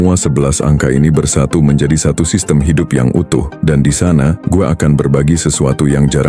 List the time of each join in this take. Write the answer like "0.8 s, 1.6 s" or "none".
3.5 s